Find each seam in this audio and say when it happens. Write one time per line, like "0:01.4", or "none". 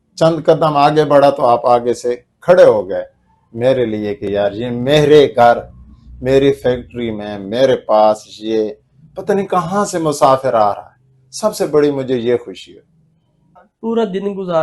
0:13.6